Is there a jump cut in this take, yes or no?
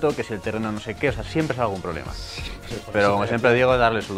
no